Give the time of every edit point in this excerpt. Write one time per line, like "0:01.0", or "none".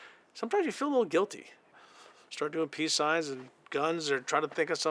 0:01.7